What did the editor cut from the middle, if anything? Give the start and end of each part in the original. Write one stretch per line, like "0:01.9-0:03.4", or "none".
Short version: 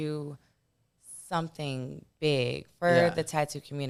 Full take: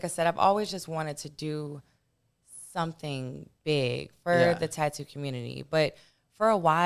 none

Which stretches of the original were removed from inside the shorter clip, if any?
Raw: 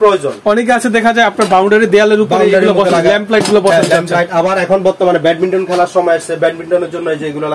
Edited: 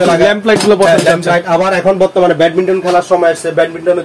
none

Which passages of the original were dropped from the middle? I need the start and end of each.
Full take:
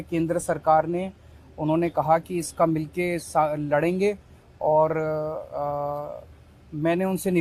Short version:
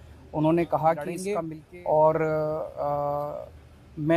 0:02.5-0:04.0

